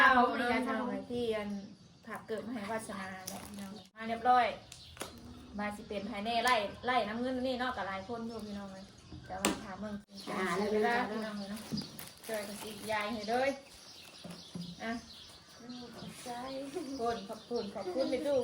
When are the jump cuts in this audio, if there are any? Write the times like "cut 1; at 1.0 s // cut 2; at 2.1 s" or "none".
cut 1; at 4.0 s // cut 2; at 10.0 s